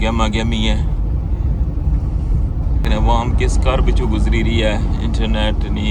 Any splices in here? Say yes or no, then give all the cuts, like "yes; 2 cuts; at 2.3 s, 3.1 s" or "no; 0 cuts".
yes; 1 cut; at 2.9 s